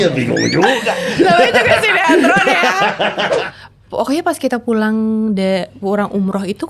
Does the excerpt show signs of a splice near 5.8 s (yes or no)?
no